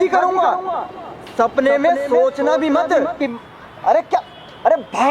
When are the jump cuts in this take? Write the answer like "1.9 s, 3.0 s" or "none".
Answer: 3.1 s